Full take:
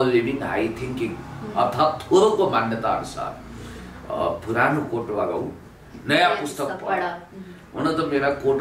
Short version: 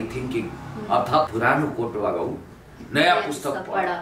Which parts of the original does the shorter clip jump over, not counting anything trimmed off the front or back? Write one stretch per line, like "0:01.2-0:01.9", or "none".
0:02.0-0:04.4